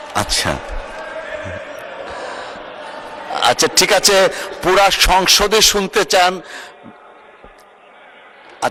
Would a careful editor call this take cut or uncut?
uncut